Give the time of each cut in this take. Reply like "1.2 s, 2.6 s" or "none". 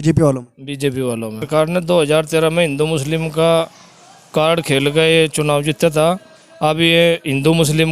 1.5 s